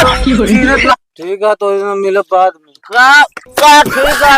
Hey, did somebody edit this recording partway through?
yes; 1 cut; at 0.9 s

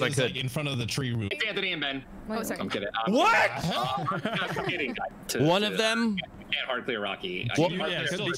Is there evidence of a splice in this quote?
yes; 2 cuts; at 1.3 s, 5.1 s

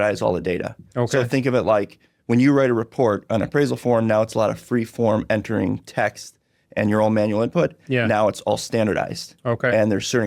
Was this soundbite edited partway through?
no; 0 cuts

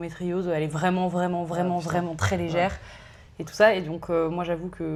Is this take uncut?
yes; 0 cuts

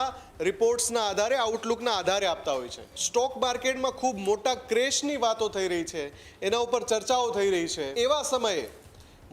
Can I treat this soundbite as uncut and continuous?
no; 2 cuts; at 3.0 s, 7.8 s

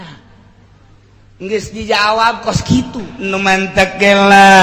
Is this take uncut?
no; 1 cut; at 3.1 s

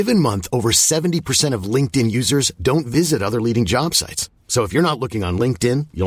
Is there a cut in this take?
no; 0 cuts

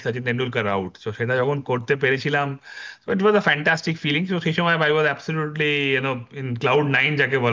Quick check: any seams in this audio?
no; 0 cuts

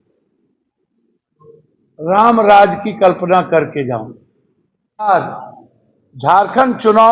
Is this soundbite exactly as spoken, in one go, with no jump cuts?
no; 1 cut; at 5.1 s

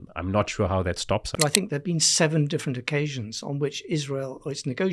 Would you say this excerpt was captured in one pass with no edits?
no; 1 cut; at 1.3 s

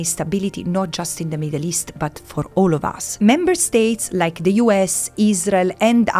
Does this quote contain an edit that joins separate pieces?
yes; 1 cut; at 3.0 s

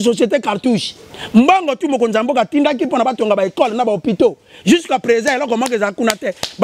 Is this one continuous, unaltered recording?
yes; 0 cuts

